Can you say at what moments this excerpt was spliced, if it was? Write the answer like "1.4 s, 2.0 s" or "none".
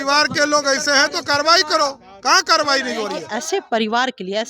3.3 s